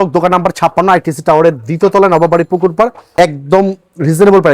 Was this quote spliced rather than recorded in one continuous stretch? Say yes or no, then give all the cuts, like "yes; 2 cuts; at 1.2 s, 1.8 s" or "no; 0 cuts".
yes; 1 cut; at 3.2 s